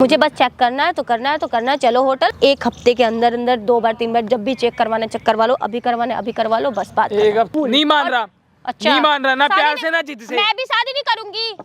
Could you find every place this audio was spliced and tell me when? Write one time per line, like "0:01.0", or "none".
0:02.4
0:07.5